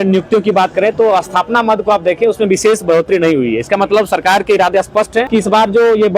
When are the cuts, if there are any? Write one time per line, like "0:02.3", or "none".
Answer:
0:05.3